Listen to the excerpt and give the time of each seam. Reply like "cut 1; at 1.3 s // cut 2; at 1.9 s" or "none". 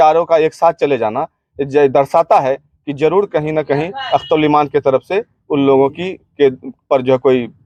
none